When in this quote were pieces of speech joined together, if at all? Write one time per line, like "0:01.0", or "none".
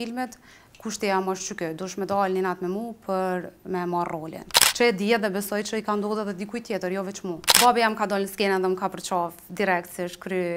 0:04.6
0:07.5

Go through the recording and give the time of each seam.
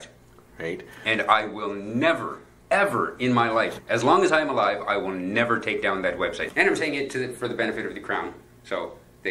0:03.8
0:06.5

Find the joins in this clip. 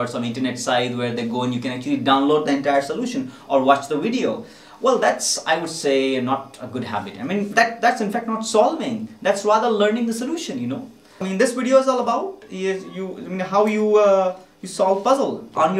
0:11.2

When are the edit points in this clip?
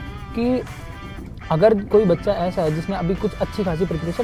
none

